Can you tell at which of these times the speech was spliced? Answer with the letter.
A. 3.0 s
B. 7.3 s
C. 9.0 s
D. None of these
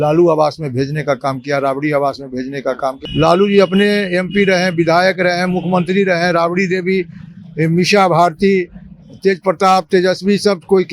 A